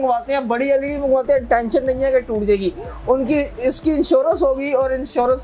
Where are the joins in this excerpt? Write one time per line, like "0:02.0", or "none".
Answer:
none